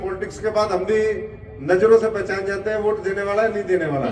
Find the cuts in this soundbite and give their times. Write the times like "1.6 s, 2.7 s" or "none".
none